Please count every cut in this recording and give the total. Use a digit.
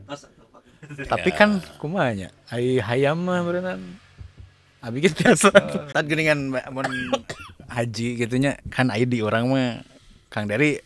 1